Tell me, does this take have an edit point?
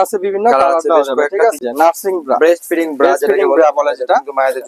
yes; 1 cut; at 1.6 s

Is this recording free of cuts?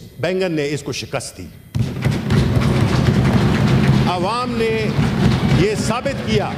yes; 0 cuts

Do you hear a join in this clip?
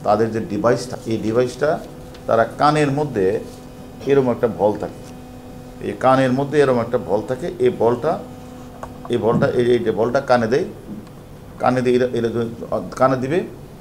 yes; 2 cuts; at 0.9 s, 5.7 s

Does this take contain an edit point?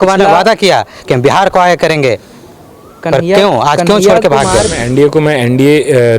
yes; 1 cut; at 4.8 s

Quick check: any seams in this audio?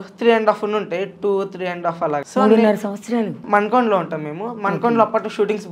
yes; 2 cuts; at 2.2 s, 3.4 s

